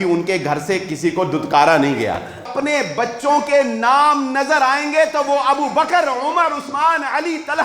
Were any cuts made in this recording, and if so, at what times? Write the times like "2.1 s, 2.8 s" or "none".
2.5 s